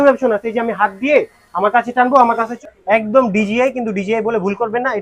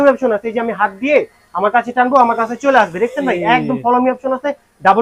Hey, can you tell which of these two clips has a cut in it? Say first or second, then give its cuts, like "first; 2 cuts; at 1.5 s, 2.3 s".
first; 1 cut; at 2.5 s